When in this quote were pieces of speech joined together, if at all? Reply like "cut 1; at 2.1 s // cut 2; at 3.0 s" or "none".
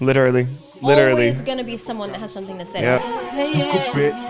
cut 1; at 3.0 s